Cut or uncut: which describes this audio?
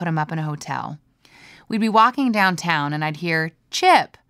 uncut